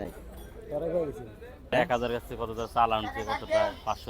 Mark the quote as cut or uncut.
cut